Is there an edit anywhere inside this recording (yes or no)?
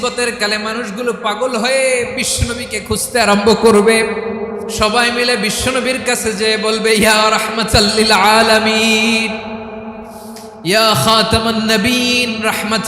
yes